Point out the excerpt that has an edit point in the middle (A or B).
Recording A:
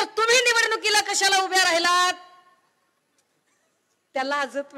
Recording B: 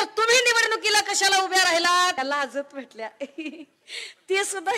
B